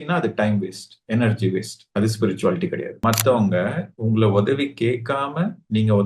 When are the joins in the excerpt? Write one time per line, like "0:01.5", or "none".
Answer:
0:02.9